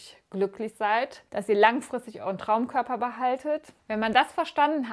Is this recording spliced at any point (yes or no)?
yes